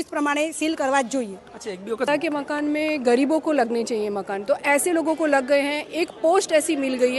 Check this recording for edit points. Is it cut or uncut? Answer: cut